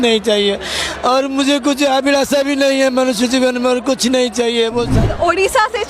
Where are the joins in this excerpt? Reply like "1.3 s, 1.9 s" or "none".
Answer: 4.9 s